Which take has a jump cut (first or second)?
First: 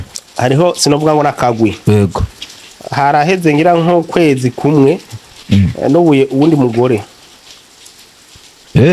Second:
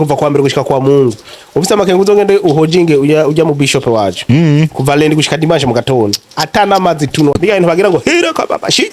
second